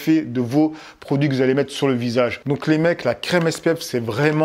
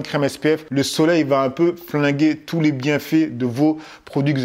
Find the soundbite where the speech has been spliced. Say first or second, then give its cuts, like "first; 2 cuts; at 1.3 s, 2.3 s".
first; 1 cut; at 2.4 s